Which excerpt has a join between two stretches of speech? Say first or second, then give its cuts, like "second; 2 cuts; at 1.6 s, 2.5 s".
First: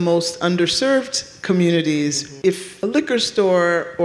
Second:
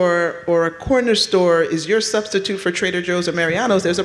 first; 1 cut; at 2.4 s